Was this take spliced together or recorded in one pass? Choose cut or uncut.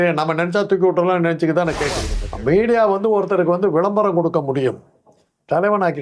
cut